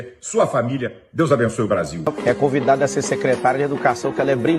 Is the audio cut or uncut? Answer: uncut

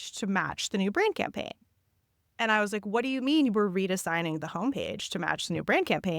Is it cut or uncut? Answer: uncut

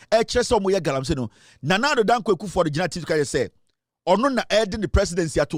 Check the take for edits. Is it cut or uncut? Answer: uncut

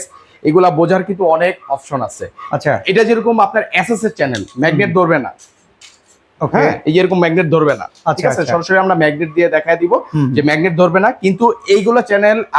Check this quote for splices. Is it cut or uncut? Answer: uncut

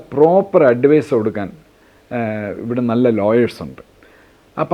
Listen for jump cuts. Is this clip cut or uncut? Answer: uncut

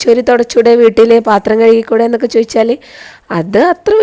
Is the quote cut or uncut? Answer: uncut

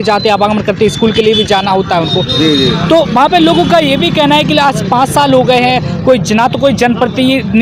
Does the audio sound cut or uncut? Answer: uncut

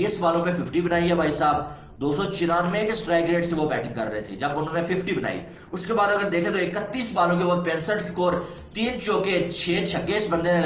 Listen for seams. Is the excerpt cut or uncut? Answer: uncut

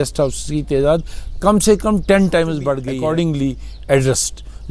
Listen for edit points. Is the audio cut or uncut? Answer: cut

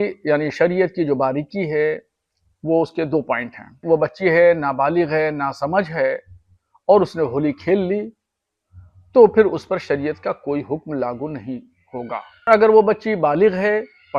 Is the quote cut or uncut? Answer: cut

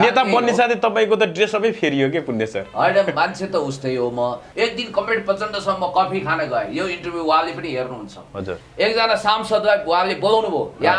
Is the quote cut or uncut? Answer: cut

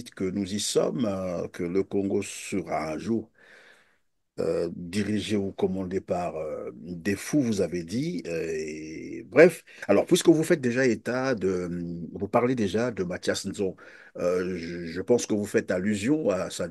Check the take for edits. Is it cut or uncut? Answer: cut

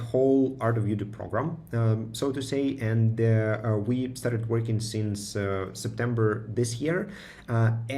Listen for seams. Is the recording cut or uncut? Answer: uncut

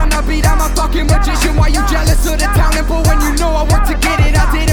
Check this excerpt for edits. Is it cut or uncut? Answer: uncut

